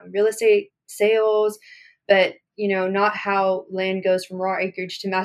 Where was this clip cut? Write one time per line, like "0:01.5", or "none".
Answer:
none